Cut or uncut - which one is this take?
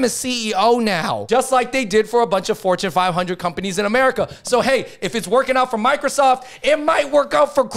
uncut